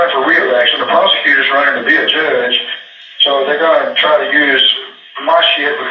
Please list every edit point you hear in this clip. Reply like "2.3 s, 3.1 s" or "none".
none